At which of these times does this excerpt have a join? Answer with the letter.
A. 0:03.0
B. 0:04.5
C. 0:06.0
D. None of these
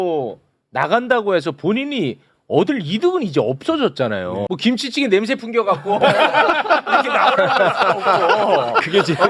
B